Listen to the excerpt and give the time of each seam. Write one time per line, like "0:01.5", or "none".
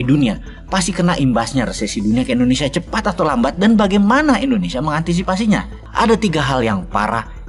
0:05.7